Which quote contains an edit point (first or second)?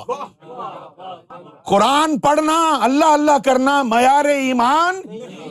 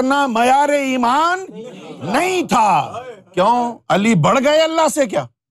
first